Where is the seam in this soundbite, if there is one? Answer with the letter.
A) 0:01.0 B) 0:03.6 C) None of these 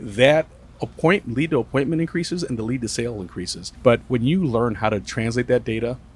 B